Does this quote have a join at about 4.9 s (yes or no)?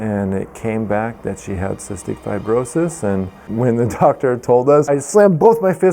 yes